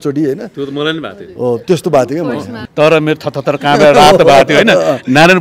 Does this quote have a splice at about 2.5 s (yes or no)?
yes